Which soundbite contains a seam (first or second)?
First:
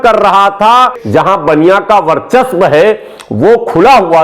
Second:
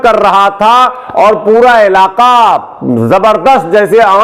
first